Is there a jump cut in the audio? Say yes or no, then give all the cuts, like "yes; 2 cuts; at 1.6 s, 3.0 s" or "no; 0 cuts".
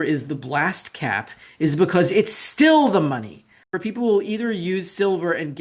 yes; 1 cut; at 3.7 s